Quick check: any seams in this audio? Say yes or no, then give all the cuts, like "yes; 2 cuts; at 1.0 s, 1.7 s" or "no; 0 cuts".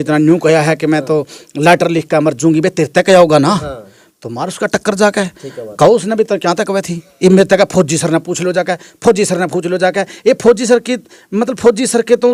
no; 0 cuts